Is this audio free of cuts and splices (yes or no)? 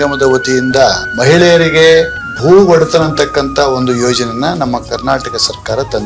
no